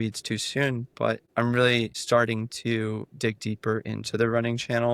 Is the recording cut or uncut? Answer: cut